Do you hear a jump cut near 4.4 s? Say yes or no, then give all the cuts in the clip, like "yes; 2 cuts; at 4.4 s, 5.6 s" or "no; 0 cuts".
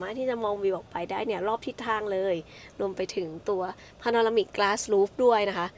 no; 0 cuts